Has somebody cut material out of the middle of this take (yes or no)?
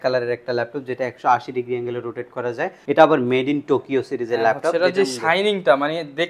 yes